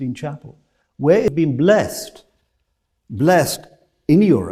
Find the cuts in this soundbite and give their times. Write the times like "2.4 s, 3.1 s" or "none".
1.3 s